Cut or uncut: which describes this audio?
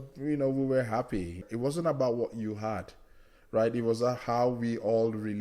cut